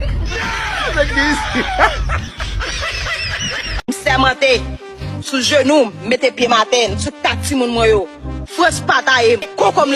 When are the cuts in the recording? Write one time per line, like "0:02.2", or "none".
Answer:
0:03.9